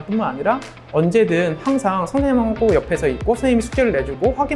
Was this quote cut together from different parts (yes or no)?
no